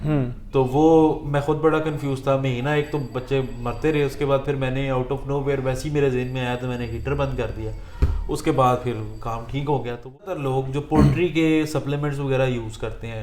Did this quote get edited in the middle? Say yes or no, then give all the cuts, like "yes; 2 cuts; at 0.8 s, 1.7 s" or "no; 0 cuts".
yes; 1 cut; at 10.3 s